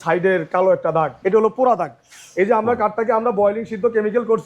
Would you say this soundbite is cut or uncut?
cut